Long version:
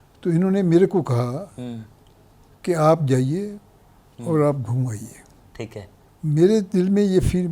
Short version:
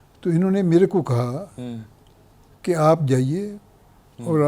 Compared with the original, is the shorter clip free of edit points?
yes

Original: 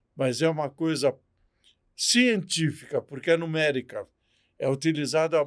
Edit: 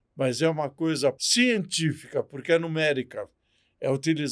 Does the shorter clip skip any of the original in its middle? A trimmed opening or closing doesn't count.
yes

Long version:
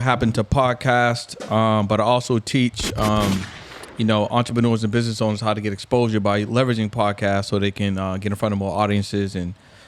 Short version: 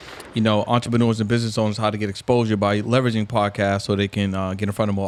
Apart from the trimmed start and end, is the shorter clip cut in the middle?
no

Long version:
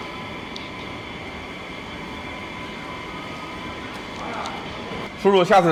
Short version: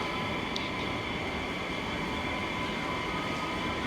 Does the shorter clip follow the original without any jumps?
yes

